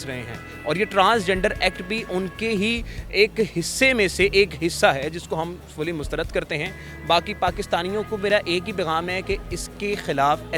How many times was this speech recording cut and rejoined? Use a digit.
0